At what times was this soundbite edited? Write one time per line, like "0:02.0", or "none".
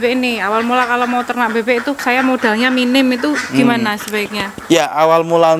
0:02.0